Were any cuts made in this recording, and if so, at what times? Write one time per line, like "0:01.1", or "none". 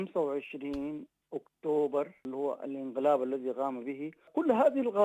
0:02.2
0:04.3